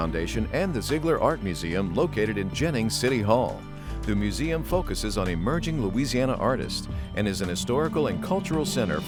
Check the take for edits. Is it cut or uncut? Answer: uncut